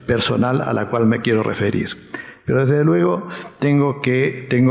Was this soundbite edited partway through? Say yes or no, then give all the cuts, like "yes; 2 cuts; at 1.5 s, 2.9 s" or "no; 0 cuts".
no; 0 cuts